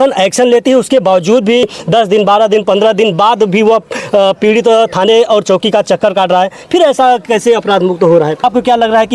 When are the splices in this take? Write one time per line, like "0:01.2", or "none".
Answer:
0:01.6
0:08.4